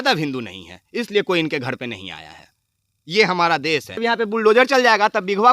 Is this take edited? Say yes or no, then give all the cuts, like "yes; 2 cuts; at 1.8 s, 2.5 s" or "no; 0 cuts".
yes; 1 cut; at 4.0 s